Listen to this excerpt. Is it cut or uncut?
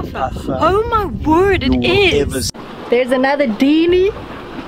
cut